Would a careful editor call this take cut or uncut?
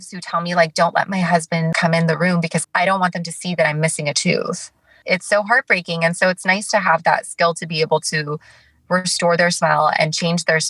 cut